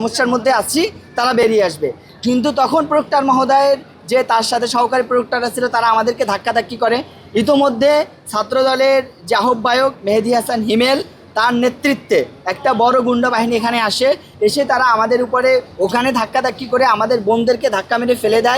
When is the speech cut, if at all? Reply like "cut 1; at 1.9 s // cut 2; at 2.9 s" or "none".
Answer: none